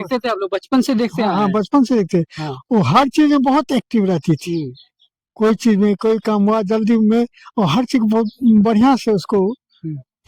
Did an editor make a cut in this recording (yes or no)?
no